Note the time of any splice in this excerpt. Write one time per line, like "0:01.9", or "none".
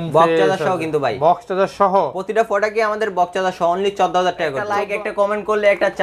0:04.7